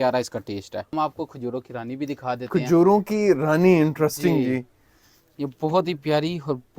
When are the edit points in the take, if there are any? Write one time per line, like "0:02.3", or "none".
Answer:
0:00.9